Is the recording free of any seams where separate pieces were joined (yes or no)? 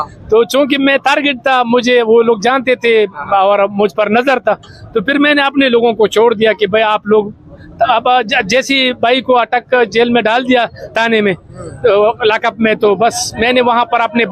yes